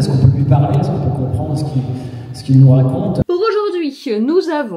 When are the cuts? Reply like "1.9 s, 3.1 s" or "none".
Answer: 3.2 s